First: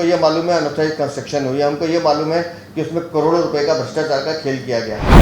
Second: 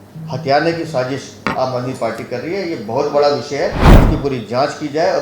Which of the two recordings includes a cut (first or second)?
second